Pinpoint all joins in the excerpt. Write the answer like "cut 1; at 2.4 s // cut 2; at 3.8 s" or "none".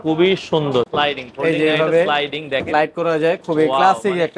cut 1; at 0.9 s